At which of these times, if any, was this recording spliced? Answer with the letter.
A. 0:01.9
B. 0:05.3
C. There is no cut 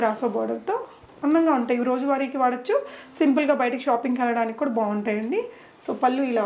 C